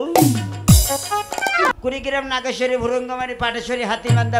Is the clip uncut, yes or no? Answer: no